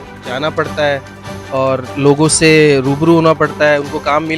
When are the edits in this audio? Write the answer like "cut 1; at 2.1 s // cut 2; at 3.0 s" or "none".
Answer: none